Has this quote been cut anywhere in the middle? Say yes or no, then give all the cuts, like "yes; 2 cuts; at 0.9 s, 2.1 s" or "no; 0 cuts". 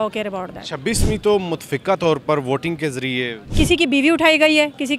yes; 1 cut; at 3.4 s